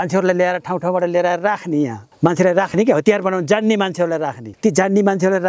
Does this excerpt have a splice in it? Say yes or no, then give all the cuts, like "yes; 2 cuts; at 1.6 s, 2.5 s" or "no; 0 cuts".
yes; 2 cuts; at 2.0 s, 4.4 s